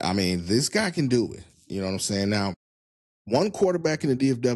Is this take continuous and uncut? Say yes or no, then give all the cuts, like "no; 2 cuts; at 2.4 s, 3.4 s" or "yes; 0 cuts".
yes; 0 cuts